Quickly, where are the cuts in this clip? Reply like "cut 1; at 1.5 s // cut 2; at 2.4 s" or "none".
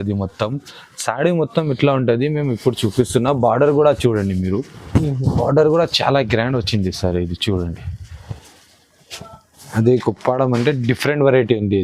cut 1; at 9.7 s